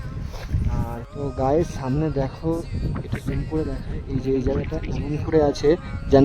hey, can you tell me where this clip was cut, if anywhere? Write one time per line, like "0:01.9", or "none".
0:01.1

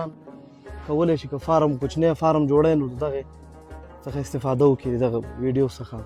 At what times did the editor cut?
none

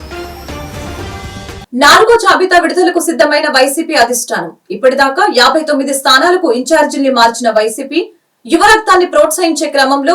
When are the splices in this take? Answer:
0:01.6

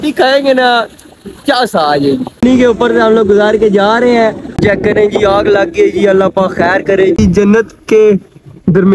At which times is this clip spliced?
0:02.4
0:04.6
0:07.2

